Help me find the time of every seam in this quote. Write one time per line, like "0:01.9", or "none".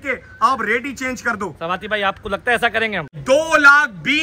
0:03.1